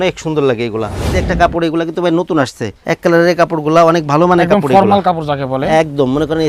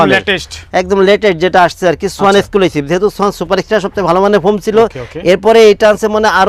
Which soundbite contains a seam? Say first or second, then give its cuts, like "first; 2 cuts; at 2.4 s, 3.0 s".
first; 2 cuts; at 1.2 s, 2.7 s